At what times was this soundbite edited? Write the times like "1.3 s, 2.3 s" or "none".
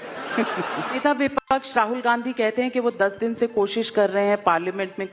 1.0 s